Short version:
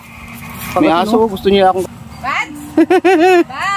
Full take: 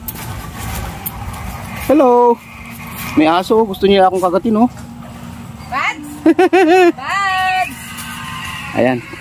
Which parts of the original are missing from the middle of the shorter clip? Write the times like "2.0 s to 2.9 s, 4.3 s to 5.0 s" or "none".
4.2 s to 5.3 s